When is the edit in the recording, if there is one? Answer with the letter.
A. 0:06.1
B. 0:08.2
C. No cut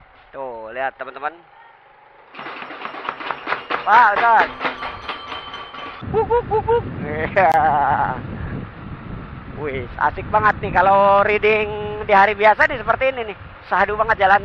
A